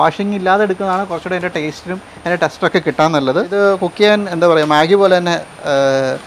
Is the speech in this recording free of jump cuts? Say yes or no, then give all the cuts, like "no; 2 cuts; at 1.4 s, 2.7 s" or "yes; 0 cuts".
no; 1 cut; at 3.5 s